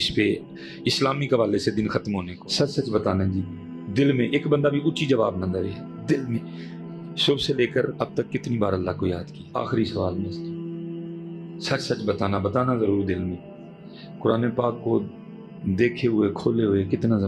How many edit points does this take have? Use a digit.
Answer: 2